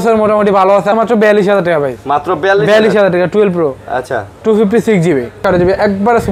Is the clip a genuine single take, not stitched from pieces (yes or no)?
no